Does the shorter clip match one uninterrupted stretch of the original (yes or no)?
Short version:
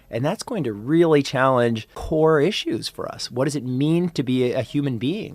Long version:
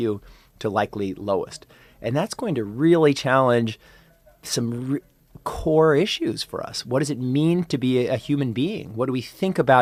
no